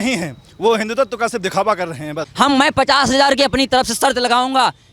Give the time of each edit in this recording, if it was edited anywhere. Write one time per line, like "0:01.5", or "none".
0:02.2